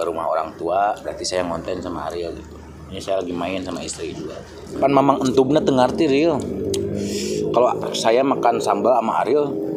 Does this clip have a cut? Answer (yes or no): yes